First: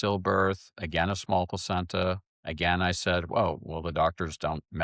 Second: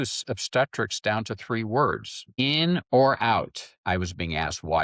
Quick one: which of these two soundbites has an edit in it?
second; 2 cuts; at 2.2 s, 3.7 s

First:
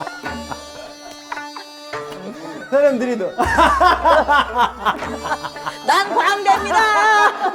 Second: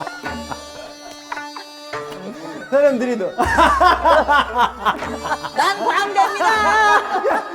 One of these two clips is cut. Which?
second; 1 cut; at 5.5 s

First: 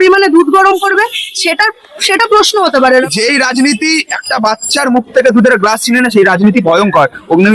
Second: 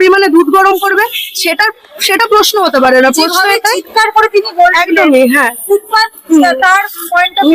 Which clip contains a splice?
first; 1 cut; at 3.0 s

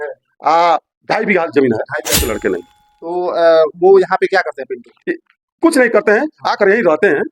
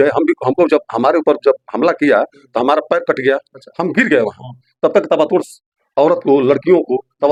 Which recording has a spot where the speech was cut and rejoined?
first; 1 cut; at 2.2 s

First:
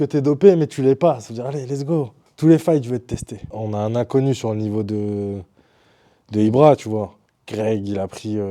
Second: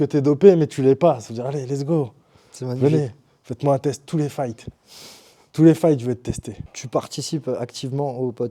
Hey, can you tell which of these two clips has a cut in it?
first; 3 cuts; at 2.2 s, 3.5 s, 7.2 s

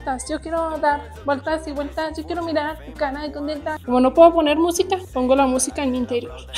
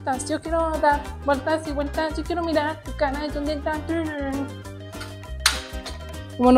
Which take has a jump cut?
first; 2 cuts; at 3.8 s, 5.1 s

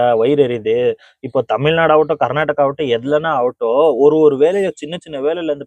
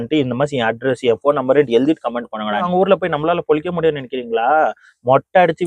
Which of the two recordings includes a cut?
second; 1 cut; at 2.7 s

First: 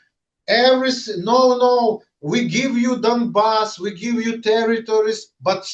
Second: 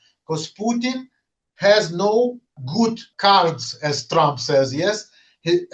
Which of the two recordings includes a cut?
second; 1 cut; at 3.0 s

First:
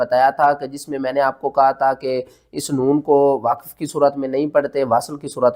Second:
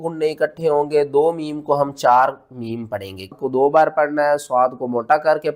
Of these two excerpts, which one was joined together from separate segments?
second; 1 cut; at 3.4 s

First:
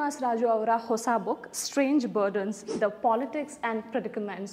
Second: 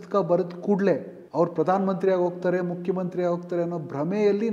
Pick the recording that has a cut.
second; 1 cut; at 1.2 s

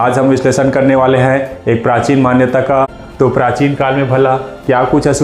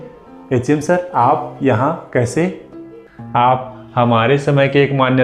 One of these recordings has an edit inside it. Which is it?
first; 1 cut; at 3.0 s

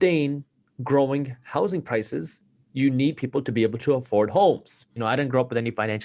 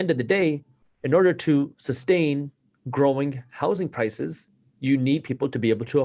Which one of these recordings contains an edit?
first; 1 cut; at 4.9 s

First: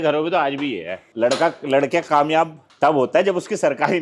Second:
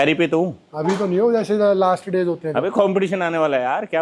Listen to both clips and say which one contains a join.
first; 2 cuts; at 1.0 s, 2.6 s

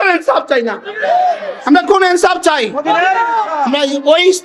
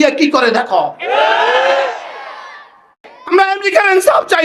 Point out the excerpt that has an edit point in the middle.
second; 1 cut; at 3.2 s

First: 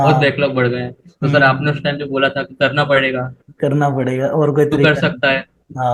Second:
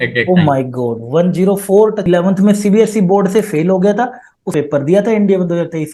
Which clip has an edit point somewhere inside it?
second; 2 cuts; at 2.0 s, 4.5 s

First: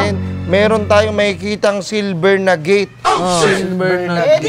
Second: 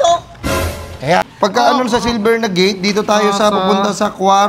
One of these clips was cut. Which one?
second; 1 cut; at 1.3 s

